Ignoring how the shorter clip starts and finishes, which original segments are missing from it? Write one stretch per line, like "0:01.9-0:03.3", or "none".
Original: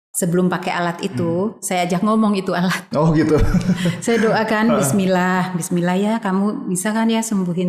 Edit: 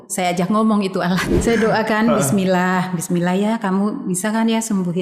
0:02.9-0:04.0